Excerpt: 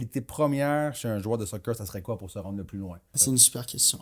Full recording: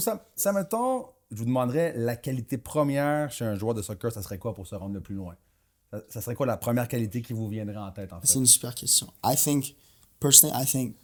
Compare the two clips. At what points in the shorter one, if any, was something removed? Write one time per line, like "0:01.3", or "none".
0:03.1